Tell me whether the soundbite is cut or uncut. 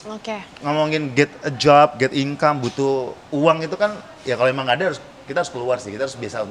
uncut